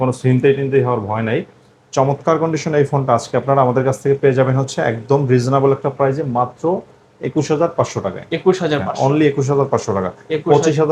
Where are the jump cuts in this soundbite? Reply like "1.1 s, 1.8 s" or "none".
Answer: none